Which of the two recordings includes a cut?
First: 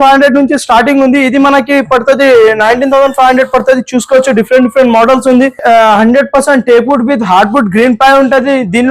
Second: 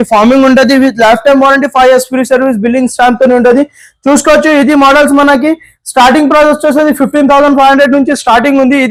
first; 1 cut; at 5.6 s

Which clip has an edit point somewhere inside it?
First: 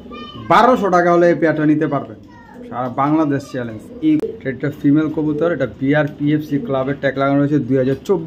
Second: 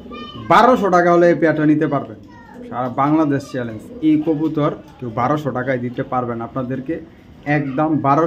first; 1 cut; at 4.2 s

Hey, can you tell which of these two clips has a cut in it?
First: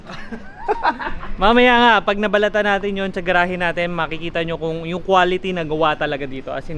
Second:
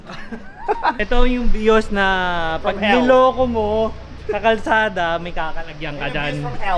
second; 1 cut; at 1.0 s

